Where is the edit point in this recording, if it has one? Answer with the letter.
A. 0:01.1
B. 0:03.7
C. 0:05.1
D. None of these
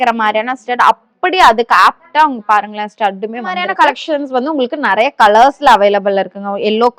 B